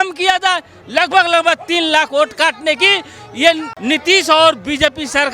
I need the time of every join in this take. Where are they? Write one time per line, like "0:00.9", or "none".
0:03.7